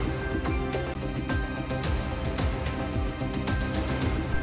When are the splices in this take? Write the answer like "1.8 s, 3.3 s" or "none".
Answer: 0.9 s